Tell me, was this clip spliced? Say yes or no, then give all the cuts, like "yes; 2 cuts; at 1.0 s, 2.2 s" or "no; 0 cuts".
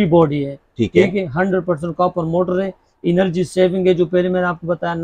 no; 0 cuts